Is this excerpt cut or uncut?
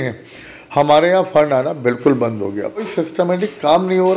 cut